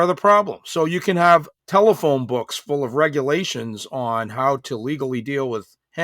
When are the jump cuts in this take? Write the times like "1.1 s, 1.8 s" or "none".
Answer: 1.6 s